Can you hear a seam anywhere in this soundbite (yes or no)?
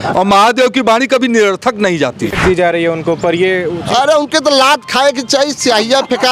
yes